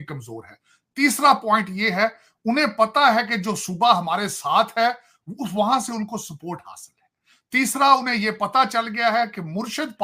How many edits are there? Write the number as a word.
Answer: zero